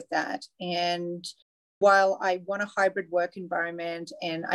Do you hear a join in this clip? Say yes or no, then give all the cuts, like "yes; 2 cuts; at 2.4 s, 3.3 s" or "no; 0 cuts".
no; 0 cuts